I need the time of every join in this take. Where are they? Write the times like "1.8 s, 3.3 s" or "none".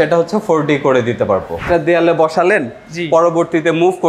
1.6 s